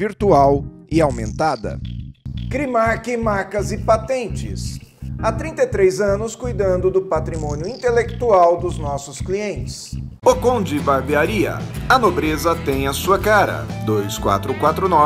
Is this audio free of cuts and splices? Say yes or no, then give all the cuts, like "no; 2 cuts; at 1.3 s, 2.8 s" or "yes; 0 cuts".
yes; 0 cuts